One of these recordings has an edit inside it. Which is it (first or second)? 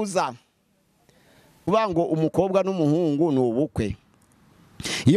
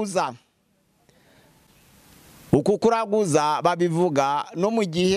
first